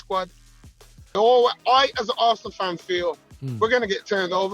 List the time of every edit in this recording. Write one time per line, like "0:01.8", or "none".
0:01.2

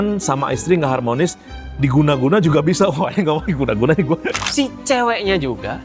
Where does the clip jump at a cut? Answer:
0:04.3

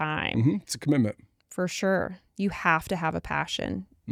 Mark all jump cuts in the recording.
none

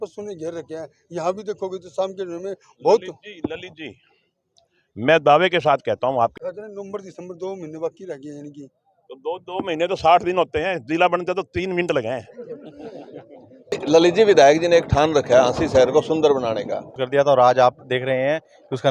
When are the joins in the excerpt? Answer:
0:06.3
0:13.8
0:17.0

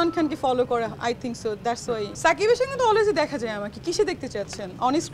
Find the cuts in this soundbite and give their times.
0:02.1

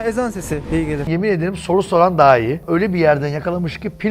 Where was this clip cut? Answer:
0:01.0
0:02.6

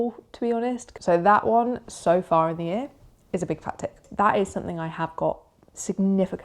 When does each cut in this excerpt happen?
0:00.9
0:04.1

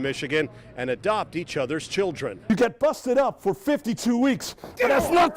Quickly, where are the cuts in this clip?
0:02.5

